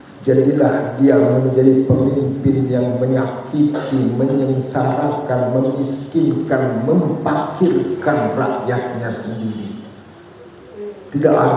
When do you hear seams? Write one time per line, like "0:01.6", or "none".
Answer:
none